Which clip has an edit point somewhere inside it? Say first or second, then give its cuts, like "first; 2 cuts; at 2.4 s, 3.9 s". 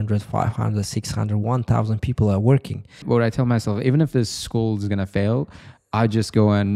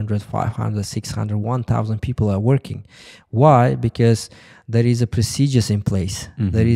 first; 1 cut; at 3.0 s